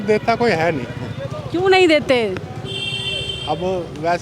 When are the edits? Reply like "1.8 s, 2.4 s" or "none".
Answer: none